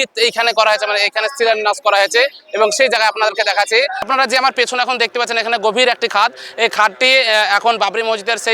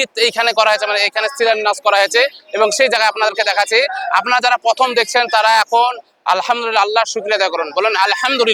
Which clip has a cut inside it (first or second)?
first